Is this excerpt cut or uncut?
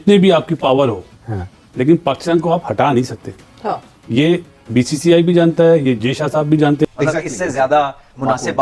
cut